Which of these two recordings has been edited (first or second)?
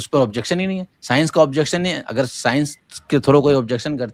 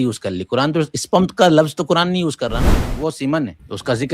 second